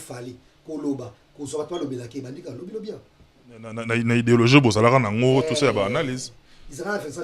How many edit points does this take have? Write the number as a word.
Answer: one